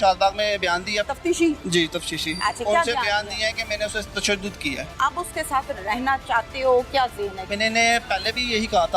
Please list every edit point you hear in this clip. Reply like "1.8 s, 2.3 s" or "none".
1.0 s, 4.9 s, 7.4 s